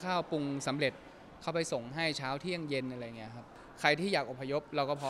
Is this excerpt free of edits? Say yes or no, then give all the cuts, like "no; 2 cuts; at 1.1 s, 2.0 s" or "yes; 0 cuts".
no; 1 cut; at 3.5 s